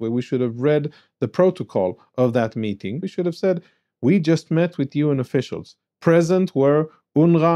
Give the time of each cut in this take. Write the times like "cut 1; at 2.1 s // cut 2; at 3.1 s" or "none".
cut 1; at 3.0 s